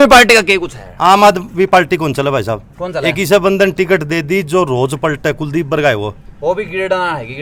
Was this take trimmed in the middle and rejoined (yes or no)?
no